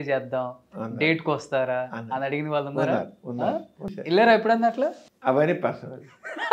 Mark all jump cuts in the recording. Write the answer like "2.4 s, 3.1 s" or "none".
3.9 s, 5.0 s